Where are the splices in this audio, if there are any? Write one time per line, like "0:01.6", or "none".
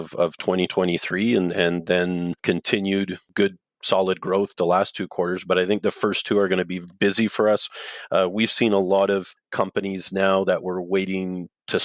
0:02.4
0:09.4